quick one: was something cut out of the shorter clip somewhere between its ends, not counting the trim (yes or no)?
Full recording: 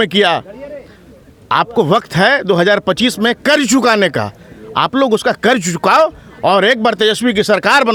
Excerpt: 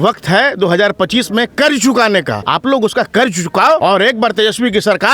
yes